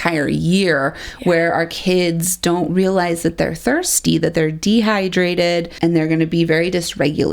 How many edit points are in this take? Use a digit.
1